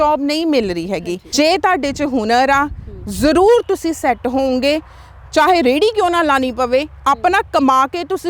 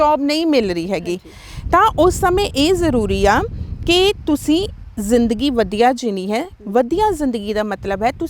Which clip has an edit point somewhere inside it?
first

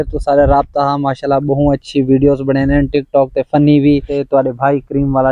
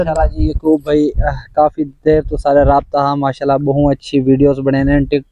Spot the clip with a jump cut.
first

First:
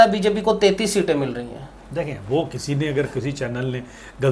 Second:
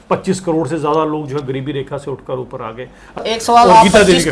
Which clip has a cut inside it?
second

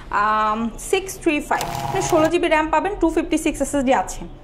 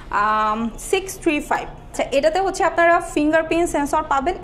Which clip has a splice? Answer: first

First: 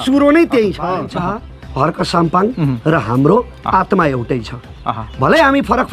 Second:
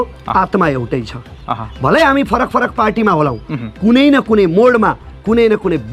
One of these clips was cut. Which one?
first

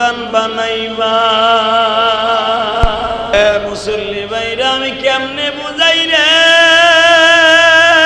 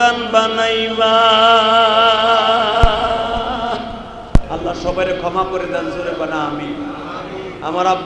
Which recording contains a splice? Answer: first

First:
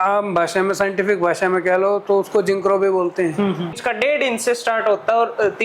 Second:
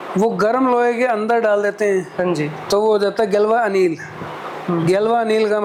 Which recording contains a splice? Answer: first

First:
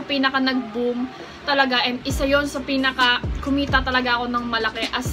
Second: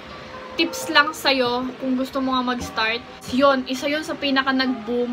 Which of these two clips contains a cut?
second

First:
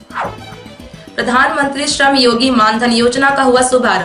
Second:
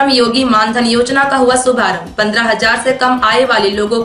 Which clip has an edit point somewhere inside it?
first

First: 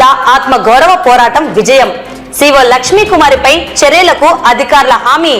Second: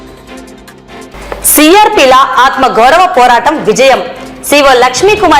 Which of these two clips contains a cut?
second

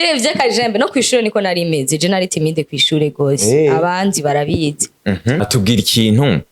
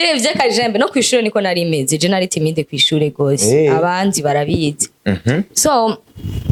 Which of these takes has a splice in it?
first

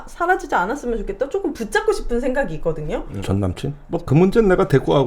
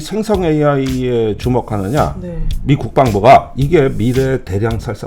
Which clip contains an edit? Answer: first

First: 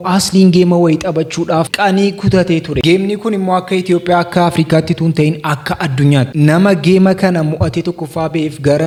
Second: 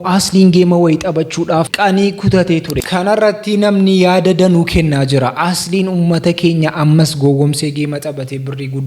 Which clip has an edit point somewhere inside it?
second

